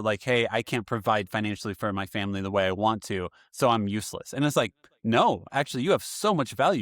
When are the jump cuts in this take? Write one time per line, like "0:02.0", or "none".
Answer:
none